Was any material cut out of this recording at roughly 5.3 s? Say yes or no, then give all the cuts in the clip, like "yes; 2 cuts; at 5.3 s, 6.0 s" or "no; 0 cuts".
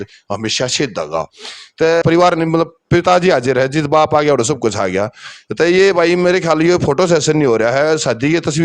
no; 1 cut; at 2.0 s